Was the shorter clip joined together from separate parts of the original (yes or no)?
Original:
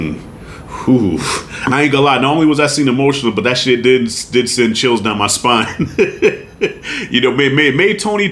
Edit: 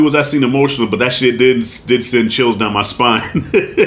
no